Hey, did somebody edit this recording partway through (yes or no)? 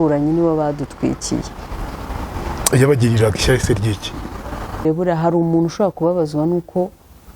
yes